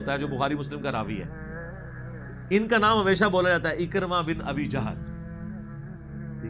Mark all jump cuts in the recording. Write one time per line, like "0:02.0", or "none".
0:01.3
0:02.5
0:04.8

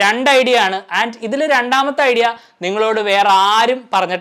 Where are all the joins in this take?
none

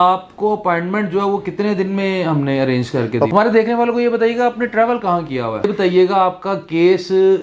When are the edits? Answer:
0:03.3
0:05.7

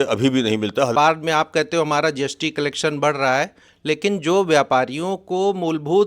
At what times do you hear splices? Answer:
0:00.9

